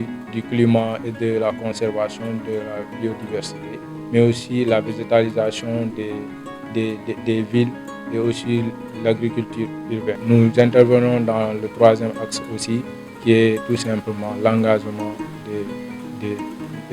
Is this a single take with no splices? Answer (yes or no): no